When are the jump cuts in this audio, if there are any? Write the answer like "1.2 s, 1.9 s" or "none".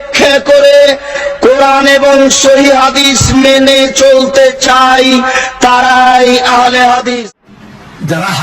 7.2 s